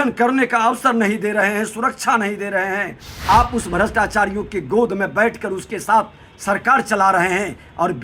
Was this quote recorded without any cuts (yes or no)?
no